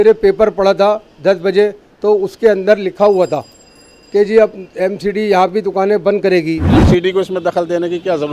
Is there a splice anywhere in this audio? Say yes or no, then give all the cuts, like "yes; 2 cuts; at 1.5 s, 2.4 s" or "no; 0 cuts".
yes; 1 cut; at 6.8 s